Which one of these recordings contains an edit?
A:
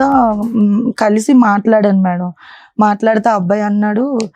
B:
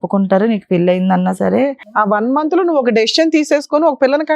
B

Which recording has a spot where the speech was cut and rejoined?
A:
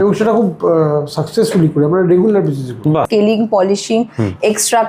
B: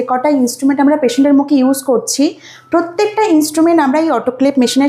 A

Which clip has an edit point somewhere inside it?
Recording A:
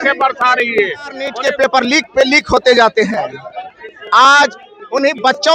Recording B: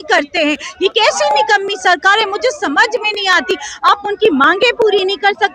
A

